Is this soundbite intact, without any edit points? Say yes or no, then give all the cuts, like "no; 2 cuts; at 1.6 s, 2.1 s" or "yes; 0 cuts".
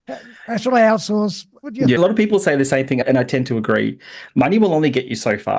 no; 1 cut; at 2.0 s